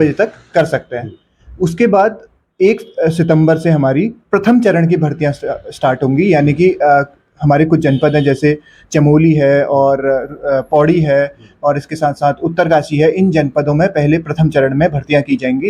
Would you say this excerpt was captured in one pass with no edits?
yes; 0 cuts

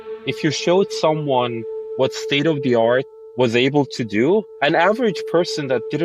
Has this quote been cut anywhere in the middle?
yes; 1 cut; at 4.5 s

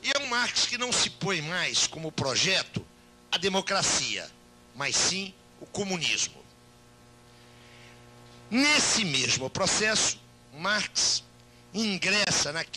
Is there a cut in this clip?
no; 0 cuts

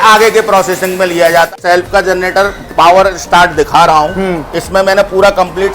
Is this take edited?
yes; 1 cut; at 1.5 s

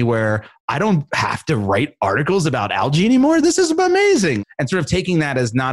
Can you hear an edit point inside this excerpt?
yes; 1 cut; at 4.4 s

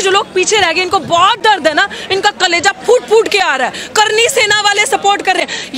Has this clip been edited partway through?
no; 0 cuts

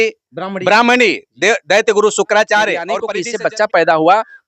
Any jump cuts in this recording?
yes; 1 cut; at 3.0 s

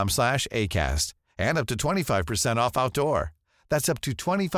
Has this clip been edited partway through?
no; 0 cuts

